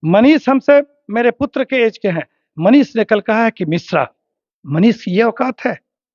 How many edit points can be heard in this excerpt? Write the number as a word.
zero